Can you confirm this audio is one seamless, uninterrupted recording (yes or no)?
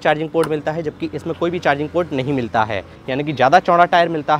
no